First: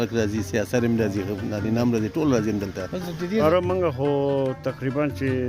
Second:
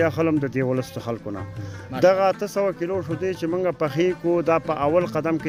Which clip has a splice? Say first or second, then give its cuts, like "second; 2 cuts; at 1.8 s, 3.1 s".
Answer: first; 1 cut; at 3.4 s